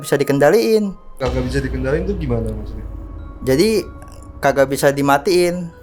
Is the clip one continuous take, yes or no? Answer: no